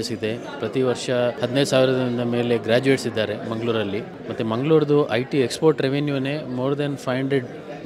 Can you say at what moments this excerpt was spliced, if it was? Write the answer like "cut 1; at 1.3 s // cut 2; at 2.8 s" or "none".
cut 1; at 1.4 s // cut 2; at 4.2 s

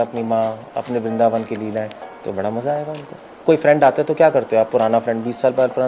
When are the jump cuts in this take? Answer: cut 1; at 3.4 s

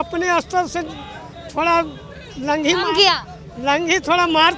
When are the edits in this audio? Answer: none

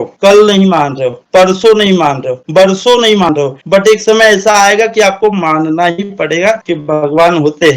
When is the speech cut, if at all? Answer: none

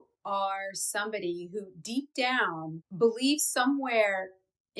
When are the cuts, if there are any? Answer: cut 1; at 2.8 s

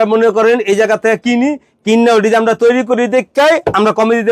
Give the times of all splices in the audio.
none

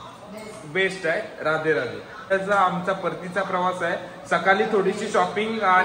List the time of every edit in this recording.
cut 1; at 2.3 s

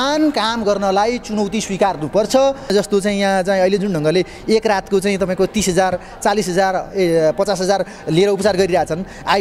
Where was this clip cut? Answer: cut 1; at 2.7 s

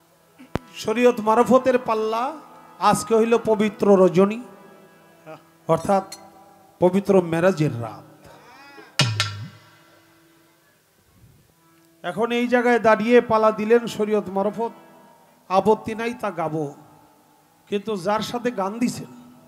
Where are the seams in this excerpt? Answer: none

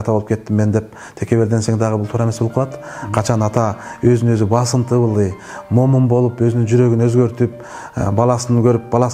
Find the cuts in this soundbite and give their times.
none

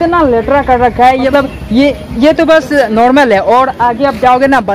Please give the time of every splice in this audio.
cut 1; at 1.3 s

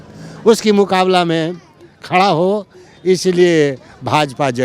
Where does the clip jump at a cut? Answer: none

